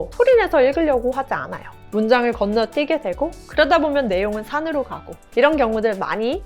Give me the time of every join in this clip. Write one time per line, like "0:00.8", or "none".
0:01.7

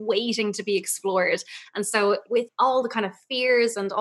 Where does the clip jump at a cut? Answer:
0:02.5

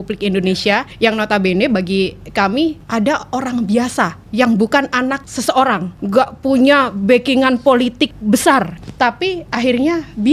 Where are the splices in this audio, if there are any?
0:00.9
0:02.8
0:04.2
0:05.3
0:05.9
0:08.2
0:08.8

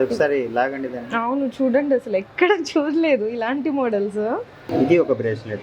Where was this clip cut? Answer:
0:04.6

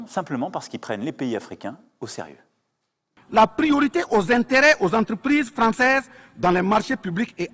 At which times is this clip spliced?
0:03.0

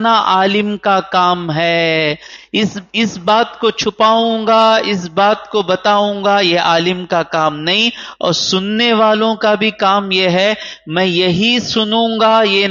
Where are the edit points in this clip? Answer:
none

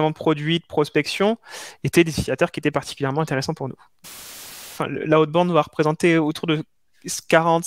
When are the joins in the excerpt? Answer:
0:04.4

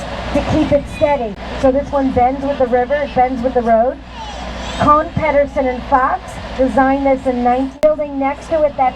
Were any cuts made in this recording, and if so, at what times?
0:01.4
0:07.8

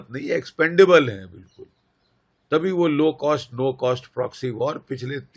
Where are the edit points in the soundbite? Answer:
none

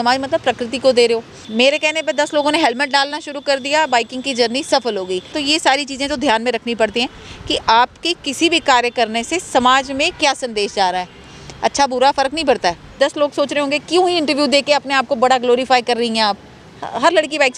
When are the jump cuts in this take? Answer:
0:01.4
0:05.4
0:12.9

